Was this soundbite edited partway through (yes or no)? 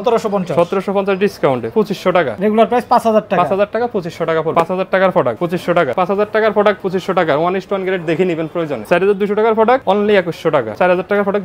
yes